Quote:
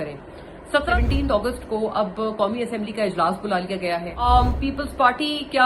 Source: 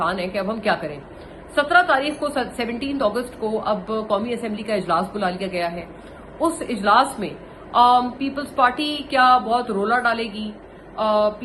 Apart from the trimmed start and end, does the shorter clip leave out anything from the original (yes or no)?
yes